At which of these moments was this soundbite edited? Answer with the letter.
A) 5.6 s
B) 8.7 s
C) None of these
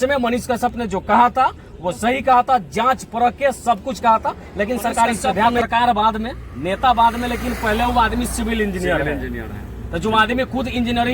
A